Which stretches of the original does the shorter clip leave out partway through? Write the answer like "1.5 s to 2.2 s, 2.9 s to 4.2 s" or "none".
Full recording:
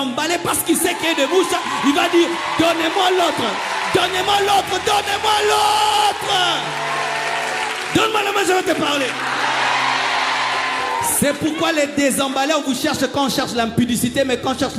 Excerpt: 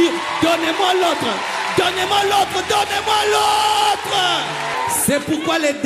6.9 s to 10.9 s